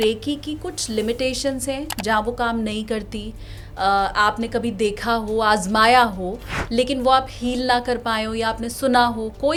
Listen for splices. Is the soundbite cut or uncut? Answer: uncut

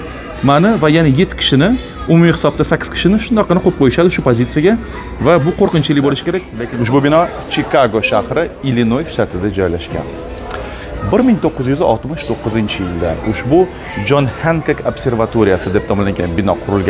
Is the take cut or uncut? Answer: cut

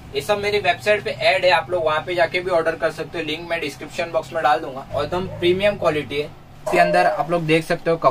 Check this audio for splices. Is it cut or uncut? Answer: cut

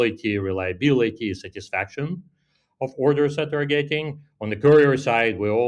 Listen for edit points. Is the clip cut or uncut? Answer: uncut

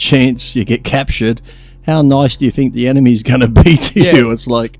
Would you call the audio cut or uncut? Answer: uncut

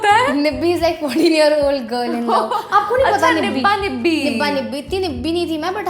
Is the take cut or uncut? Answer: uncut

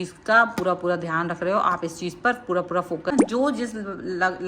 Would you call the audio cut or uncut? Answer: cut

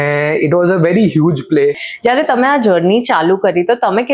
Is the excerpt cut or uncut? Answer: cut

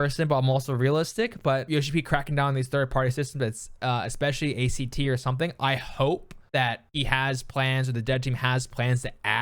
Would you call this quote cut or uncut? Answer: cut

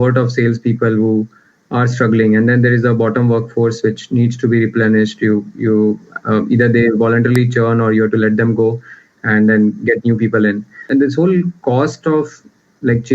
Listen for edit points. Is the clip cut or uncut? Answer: cut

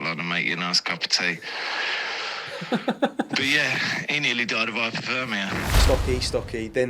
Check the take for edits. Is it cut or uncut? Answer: cut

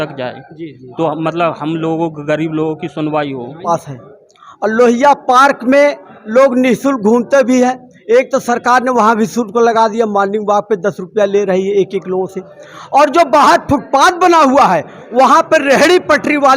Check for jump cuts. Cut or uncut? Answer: cut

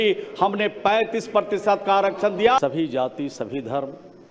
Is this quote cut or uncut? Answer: cut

